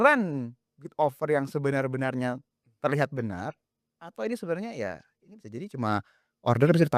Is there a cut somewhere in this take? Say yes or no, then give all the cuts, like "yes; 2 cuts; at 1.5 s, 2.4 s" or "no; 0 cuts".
no; 0 cuts